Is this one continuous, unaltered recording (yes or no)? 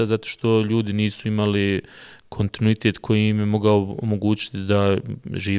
yes